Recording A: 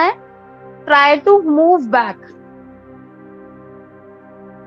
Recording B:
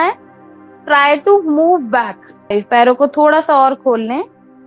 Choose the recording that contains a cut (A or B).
B